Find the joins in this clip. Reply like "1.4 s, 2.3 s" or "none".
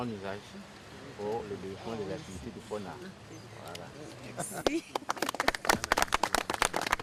none